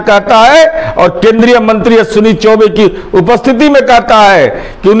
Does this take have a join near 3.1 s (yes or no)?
no